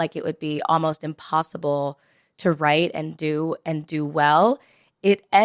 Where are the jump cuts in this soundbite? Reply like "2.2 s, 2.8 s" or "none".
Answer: none